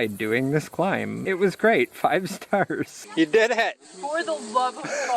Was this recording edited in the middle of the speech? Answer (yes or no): yes